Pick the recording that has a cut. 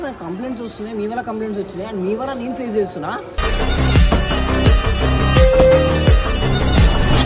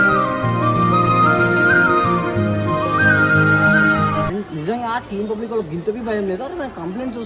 second; 1 cut; at 4.3 s

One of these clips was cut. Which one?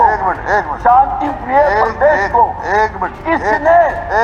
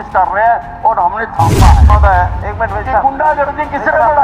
second; 1 cut; at 1.9 s

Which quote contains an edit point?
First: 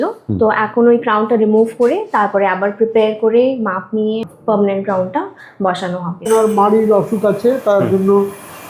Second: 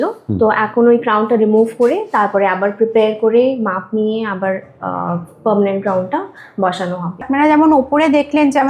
first; 2 cuts; at 4.3 s, 6.3 s

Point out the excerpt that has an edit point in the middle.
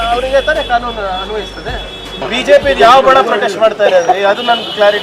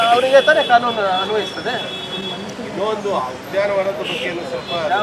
first; 1 cut; at 2.2 s

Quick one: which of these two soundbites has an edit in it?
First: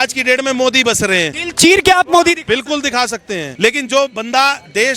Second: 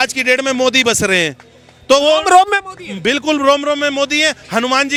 first; 2 cuts; at 1.4 s, 3.5 s

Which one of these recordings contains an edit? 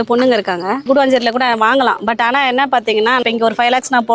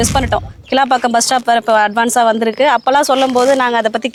first; 2 cuts; at 0.8 s, 3.2 s

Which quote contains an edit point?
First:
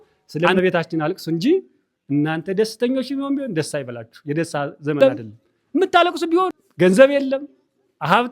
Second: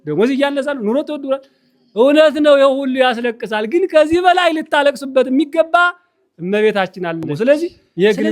first; 1 cut; at 6.6 s

